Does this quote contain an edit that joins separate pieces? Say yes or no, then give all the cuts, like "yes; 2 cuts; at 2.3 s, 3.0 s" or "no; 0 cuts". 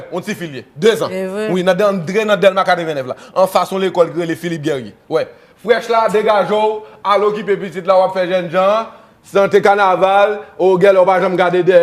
yes; 1 cut; at 0.9 s